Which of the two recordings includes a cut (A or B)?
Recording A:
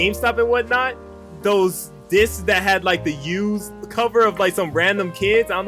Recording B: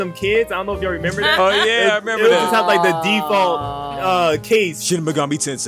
A